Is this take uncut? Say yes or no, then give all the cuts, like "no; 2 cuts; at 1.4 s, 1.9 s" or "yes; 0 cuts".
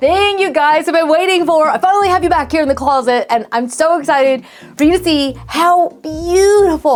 yes; 0 cuts